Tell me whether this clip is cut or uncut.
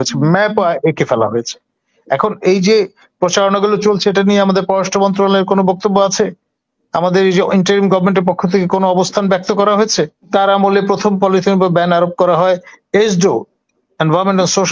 cut